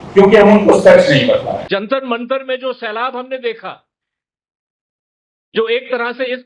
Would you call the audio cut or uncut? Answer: cut